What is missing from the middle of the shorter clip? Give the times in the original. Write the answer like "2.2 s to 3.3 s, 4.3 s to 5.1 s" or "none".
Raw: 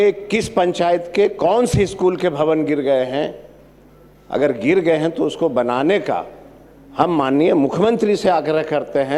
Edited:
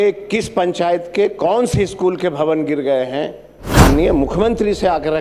3.8 s to 7.2 s